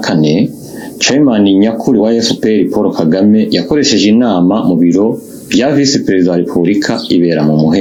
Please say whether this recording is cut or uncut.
uncut